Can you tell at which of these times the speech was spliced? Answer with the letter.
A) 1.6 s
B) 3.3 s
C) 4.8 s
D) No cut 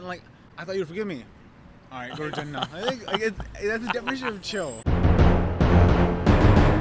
C